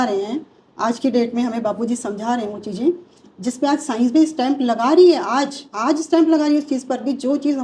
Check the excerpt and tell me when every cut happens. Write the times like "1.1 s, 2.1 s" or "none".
none